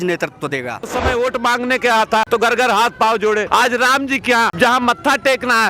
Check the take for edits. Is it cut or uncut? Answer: cut